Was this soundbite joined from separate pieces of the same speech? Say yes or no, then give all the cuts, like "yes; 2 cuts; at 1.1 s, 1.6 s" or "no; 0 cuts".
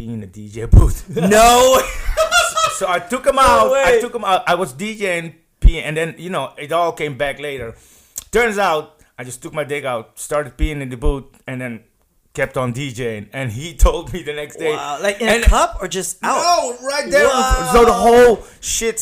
no; 0 cuts